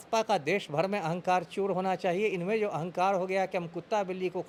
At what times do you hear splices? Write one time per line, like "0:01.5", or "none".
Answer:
none